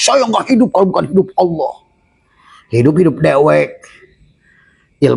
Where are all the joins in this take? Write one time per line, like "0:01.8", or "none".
none